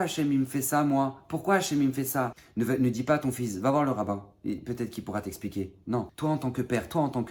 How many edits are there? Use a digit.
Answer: 2